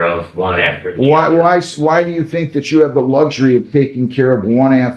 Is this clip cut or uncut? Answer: uncut